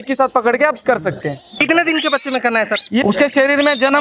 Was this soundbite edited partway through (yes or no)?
yes